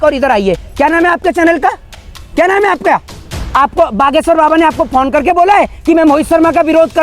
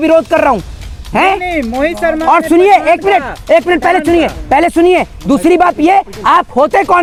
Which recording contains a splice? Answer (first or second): first